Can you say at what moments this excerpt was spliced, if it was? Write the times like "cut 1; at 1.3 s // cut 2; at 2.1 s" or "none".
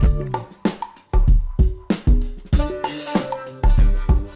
none